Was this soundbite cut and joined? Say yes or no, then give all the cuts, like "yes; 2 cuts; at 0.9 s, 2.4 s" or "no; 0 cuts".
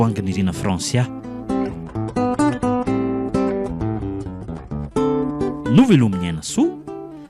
yes; 1 cut; at 1.2 s